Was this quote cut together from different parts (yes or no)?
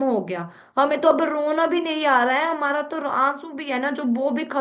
no